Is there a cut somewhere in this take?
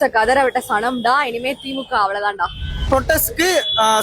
yes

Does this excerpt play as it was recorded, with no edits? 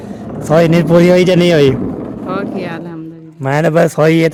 yes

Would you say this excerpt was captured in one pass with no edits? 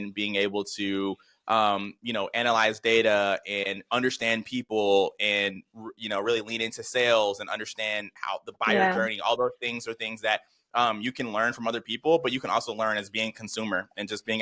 yes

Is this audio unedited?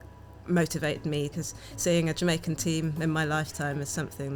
no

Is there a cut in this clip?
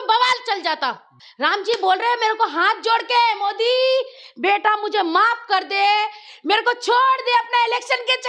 yes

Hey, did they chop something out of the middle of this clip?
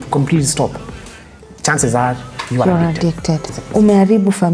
yes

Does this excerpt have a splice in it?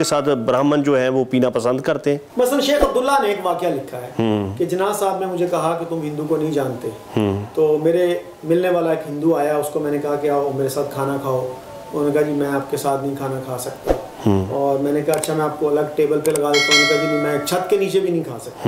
yes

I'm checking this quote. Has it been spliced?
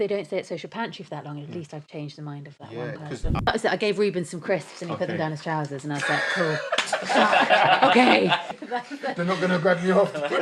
yes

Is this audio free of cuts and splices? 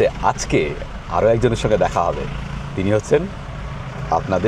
yes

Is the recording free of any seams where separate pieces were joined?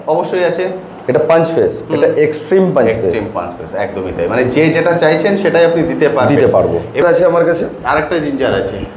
no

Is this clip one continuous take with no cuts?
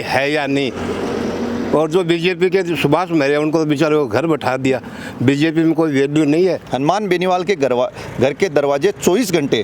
no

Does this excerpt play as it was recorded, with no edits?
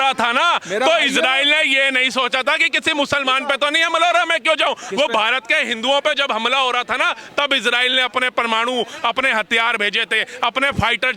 yes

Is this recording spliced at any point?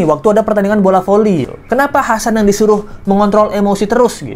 yes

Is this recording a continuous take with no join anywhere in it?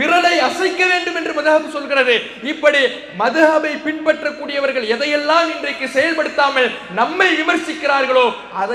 yes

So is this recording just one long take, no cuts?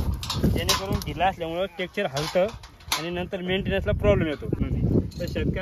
no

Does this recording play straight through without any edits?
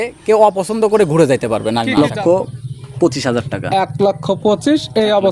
no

